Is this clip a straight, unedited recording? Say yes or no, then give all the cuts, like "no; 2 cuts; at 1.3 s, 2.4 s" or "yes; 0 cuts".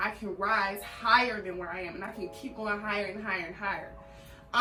yes; 0 cuts